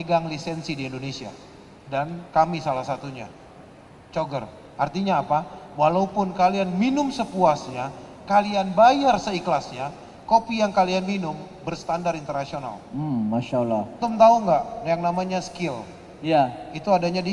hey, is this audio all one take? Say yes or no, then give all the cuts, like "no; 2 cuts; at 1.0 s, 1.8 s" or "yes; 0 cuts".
no; 1 cut; at 14.0 s